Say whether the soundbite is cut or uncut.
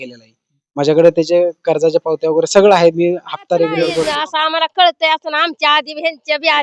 cut